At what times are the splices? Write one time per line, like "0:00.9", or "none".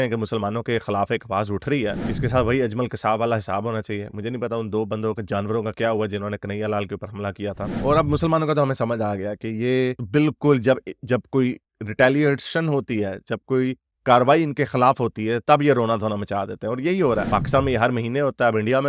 0:02.0
0:07.7
0:17.3